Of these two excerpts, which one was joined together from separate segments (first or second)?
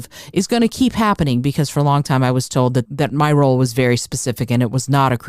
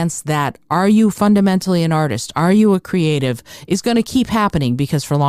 first